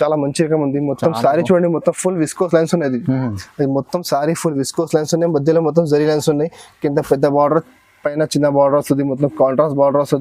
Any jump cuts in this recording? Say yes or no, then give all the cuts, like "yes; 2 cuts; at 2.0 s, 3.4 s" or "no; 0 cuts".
no; 0 cuts